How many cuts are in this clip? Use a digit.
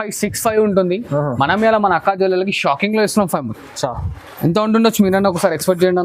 0